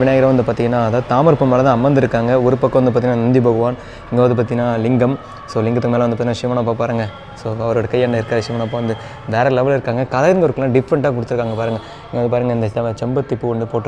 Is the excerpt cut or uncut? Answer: uncut